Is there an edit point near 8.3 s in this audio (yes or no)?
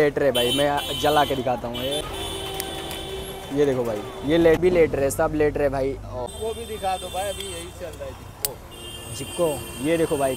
no